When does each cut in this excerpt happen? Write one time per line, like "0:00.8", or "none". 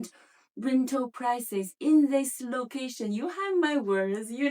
none